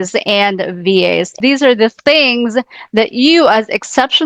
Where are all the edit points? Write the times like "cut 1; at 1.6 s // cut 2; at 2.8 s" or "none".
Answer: none